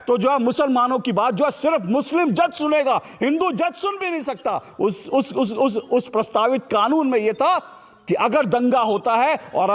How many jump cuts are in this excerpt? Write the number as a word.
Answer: zero